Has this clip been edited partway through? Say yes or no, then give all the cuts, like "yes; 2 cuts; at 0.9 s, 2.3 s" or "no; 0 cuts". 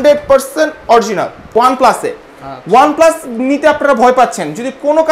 yes; 1 cut; at 1.5 s